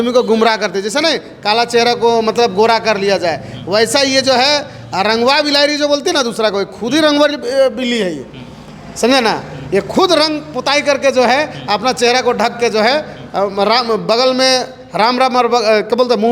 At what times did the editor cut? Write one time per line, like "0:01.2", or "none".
none